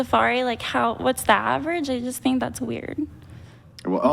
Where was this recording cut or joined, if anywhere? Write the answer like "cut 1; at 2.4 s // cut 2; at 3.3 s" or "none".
cut 1; at 1.8 s